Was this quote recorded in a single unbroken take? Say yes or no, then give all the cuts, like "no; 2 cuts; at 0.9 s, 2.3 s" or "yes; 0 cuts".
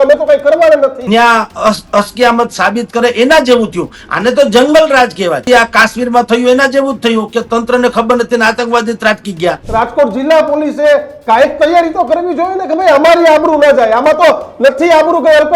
no; 3 cuts; at 1.0 s, 5.4 s, 9.6 s